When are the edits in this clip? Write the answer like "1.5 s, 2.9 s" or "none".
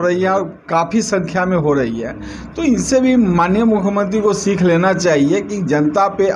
none